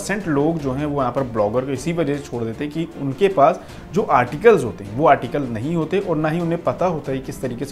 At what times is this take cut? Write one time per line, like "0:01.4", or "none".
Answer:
none